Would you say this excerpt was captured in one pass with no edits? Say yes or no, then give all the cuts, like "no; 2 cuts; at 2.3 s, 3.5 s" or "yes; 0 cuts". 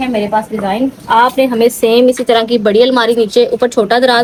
yes; 0 cuts